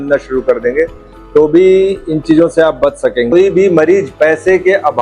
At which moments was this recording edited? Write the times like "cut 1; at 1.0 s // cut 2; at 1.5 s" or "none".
cut 1; at 3.3 s

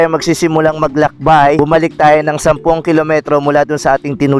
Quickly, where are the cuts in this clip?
cut 1; at 1.6 s

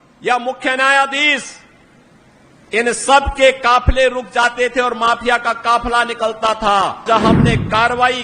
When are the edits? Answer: cut 1; at 7.0 s

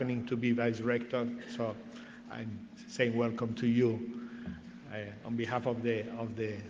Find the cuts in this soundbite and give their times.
cut 1; at 4.0 s

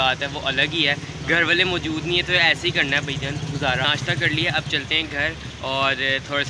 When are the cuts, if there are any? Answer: none

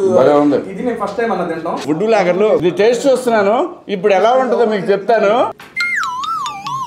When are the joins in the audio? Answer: cut 1; at 1.8 s // cut 2; at 2.6 s // cut 3; at 5.7 s

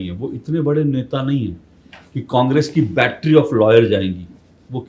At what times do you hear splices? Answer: none

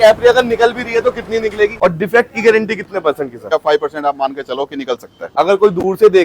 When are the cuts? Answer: cut 1; at 1.7 s // cut 2; at 3.5 s // cut 3; at 5.2 s

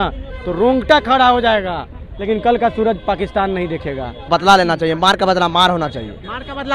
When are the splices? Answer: cut 1; at 2.1 s // cut 2; at 4.3 s

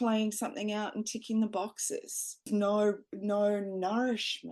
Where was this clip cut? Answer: cut 1; at 2.4 s

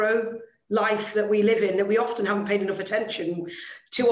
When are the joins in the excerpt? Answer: none

